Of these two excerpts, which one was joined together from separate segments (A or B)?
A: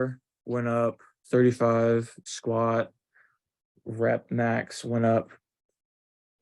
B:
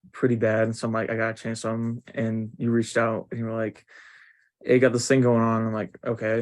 A